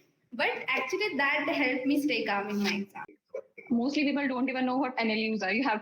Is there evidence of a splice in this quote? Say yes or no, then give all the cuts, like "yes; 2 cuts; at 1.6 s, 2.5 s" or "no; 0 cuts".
yes; 1 cut; at 3.1 s